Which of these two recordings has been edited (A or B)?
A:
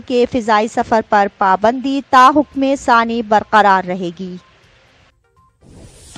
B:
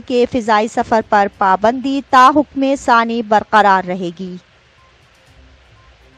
A